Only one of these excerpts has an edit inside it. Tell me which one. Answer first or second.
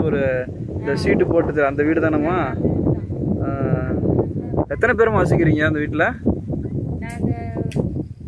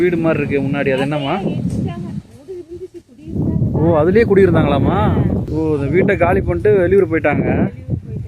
second